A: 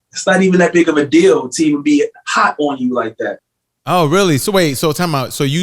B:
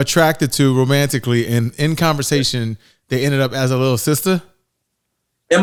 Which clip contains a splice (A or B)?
A